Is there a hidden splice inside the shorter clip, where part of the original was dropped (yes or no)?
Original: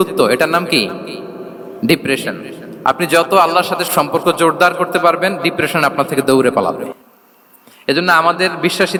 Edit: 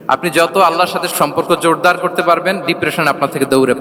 no